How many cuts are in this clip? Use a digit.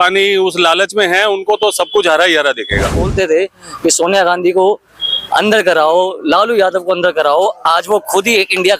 1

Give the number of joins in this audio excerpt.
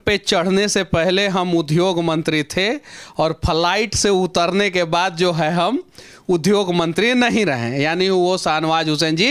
0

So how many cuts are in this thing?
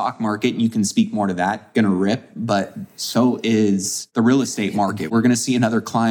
2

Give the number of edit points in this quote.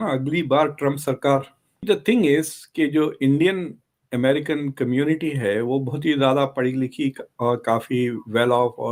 0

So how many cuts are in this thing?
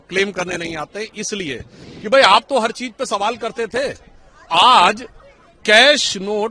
1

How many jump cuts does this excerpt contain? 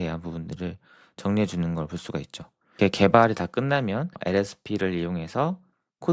2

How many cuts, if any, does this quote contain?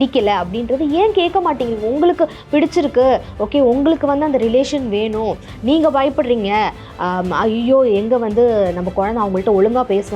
0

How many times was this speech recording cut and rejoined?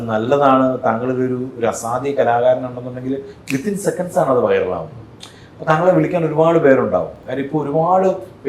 0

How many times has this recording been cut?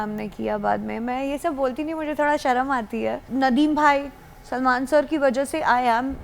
1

